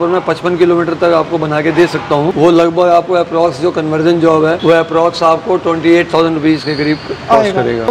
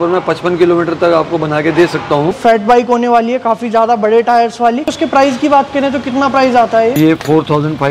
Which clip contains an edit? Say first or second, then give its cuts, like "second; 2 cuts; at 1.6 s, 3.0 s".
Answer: second; 3 cuts; at 2.3 s, 4.8 s, 7.0 s